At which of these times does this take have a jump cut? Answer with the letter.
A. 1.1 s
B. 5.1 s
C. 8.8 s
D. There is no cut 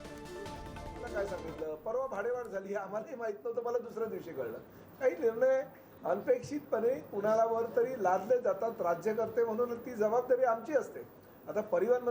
A